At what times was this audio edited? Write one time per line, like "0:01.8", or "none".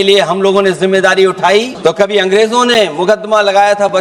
0:01.7